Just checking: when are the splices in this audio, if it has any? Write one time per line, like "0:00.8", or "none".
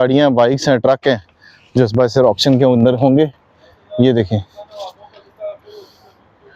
none